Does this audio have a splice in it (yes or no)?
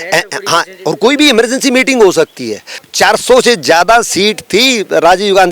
yes